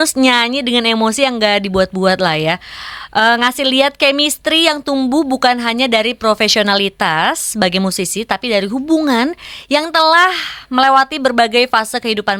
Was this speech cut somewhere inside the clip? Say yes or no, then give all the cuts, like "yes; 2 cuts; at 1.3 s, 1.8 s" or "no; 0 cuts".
no; 0 cuts